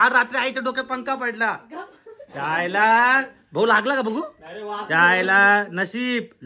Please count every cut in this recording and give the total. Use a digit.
0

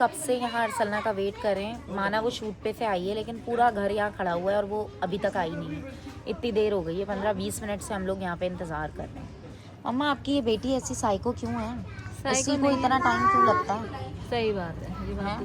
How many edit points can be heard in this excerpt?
0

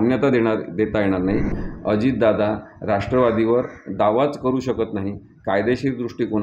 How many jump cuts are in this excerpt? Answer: 1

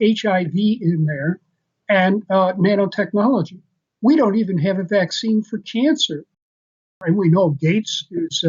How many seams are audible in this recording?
1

